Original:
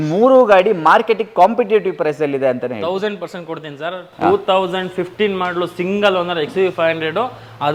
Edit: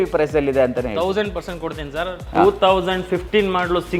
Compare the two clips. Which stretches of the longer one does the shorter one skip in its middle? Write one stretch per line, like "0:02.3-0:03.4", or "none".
none